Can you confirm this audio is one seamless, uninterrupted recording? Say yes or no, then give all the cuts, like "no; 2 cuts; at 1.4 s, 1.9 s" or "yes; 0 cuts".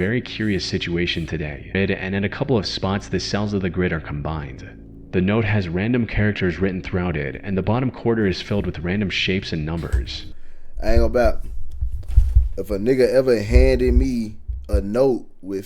no; 1 cut; at 1.8 s